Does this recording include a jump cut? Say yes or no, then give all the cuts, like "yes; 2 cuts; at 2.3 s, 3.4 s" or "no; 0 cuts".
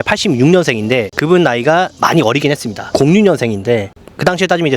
yes; 2 cuts; at 1.1 s, 2.9 s